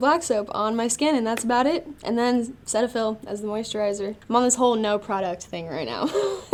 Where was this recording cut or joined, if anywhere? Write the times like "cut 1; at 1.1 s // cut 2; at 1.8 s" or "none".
none